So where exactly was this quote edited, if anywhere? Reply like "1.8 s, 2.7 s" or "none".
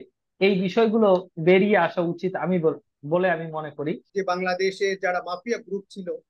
4.0 s